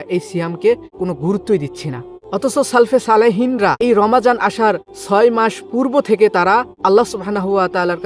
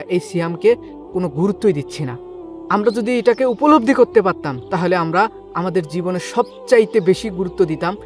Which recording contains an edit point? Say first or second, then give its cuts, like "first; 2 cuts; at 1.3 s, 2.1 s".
first; 5 cuts; at 0.9 s, 2.1 s, 3.8 s, 4.9 s, 6.7 s